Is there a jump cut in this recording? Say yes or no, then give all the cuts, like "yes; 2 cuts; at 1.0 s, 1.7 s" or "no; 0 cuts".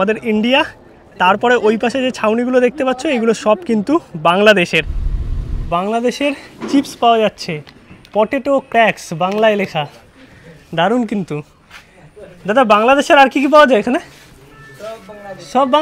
yes; 1 cut; at 5.5 s